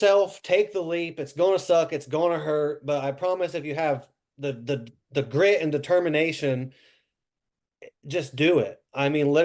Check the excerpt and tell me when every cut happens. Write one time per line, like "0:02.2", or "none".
none